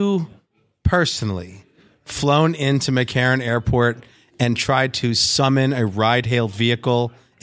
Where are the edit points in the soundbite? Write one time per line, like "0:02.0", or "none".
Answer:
none